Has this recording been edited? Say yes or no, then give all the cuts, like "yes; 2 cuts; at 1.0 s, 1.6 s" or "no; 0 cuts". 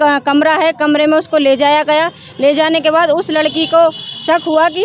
no; 0 cuts